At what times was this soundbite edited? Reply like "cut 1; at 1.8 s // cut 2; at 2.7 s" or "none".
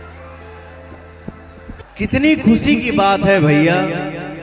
cut 1; at 1.8 s